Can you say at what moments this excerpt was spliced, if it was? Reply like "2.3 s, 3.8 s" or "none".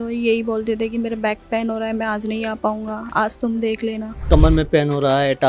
4.3 s